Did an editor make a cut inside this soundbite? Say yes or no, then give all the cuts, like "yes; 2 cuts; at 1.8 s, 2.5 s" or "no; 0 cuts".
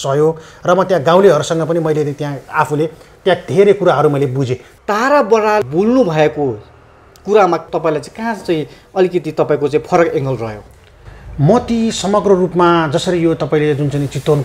yes; 1 cut; at 4.6 s